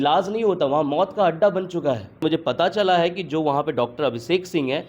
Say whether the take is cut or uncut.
cut